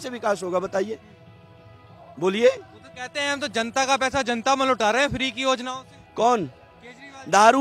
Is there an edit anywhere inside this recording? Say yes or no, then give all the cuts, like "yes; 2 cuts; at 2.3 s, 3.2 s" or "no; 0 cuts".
no; 0 cuts